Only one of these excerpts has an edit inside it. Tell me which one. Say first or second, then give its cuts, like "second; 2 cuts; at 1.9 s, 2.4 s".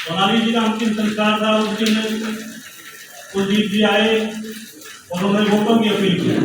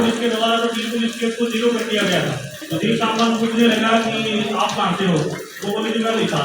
second; 1 cut; at 2.6 s